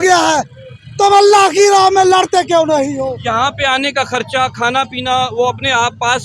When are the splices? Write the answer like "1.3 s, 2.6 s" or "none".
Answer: 3.1 s